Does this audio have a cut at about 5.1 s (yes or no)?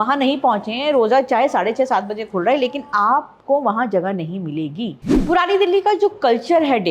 yes